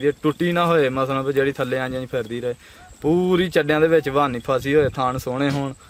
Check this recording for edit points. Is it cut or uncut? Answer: uncut